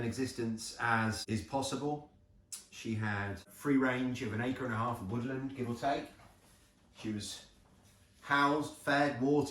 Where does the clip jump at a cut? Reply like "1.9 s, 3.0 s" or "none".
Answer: 1.2 s, 3.5 s